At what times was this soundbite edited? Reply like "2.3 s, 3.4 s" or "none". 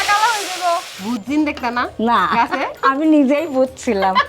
0.9 s, 2.7 s